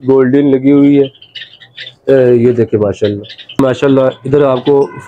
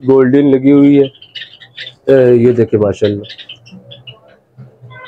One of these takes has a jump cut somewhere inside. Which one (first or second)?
first